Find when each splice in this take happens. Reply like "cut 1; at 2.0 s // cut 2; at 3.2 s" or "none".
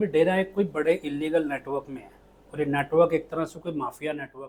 none